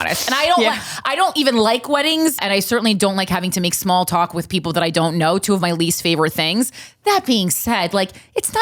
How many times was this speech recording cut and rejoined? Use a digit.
1